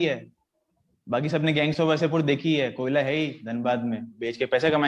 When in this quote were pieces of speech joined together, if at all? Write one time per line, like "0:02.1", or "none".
none